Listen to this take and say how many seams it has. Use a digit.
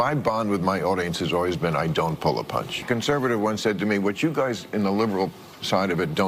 1